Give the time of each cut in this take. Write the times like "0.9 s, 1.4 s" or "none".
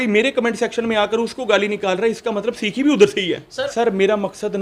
3.6 s